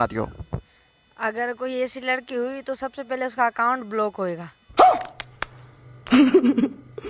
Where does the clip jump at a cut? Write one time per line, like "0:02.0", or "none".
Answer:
none